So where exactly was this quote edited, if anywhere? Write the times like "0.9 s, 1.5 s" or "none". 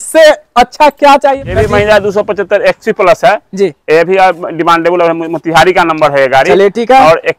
1.4 s